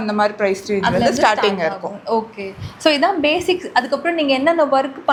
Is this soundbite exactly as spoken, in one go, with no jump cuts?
yes; 0 cuts

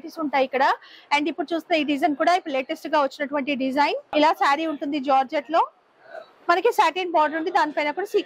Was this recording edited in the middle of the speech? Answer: yes; 1 cut; at 4.1 s

